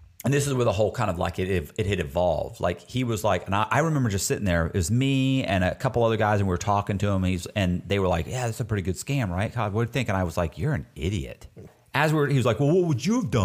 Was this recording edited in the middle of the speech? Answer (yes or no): yes